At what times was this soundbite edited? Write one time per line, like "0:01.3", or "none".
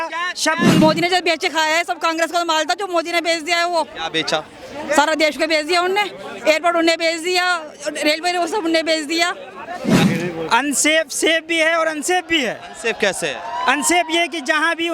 0:00.8
0:10.1